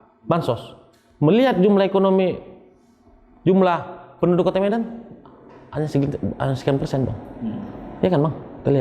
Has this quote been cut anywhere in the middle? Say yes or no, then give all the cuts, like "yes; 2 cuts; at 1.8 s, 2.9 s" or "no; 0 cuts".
no; 0 cuts